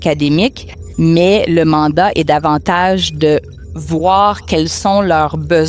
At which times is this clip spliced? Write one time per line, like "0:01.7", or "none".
none